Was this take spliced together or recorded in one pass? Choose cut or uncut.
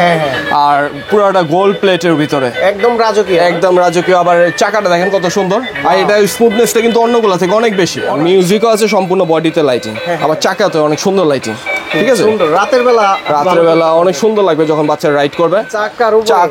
cut